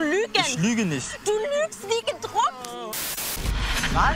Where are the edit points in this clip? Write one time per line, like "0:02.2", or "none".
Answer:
0:03.2